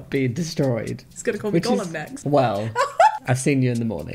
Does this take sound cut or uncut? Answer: uncut